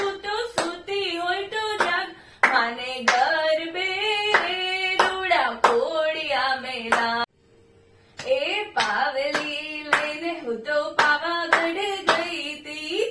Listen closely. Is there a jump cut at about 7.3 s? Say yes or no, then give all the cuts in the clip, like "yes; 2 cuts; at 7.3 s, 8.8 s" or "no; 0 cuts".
yes; 1 cut; at 7.3 s